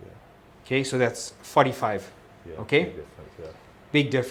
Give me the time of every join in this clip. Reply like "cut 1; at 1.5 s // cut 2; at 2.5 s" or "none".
none